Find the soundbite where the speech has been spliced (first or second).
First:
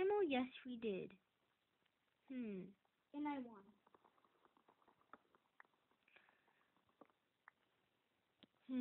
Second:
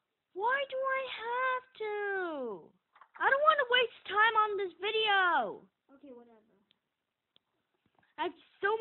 first